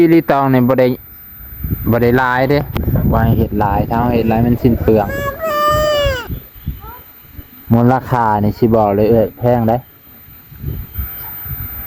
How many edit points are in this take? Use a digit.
1